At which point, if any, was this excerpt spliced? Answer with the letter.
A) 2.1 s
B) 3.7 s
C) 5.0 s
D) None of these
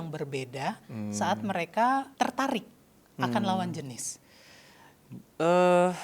A